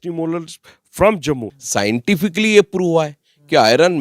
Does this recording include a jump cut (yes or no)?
yes